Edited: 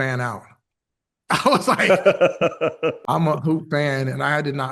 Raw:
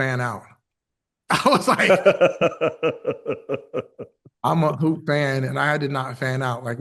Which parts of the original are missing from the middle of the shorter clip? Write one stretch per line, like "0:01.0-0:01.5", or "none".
0:03.0-0:04.3